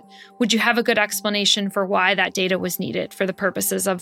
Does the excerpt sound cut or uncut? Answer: uncut